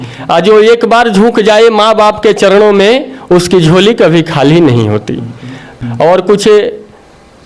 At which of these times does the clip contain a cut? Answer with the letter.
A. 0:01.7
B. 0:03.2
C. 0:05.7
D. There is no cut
C